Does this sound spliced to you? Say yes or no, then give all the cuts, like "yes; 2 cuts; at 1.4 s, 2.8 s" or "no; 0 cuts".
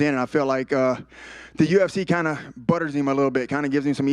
no; 0 cuts